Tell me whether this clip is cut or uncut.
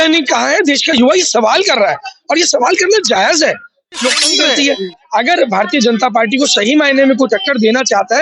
cut